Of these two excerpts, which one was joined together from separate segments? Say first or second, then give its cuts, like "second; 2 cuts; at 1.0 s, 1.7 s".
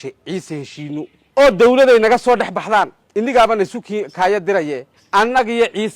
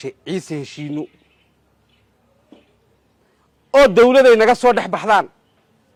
first; 3 cuts; at 1.2 s, 3.0 s, 4.9 s